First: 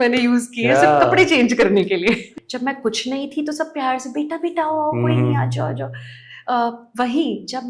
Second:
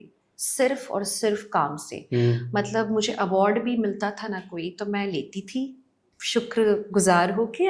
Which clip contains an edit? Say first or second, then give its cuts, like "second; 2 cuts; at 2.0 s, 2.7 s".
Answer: first; 1 cut; at 2.3 s